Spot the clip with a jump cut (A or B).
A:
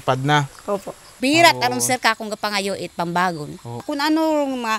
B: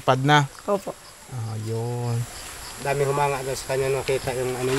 A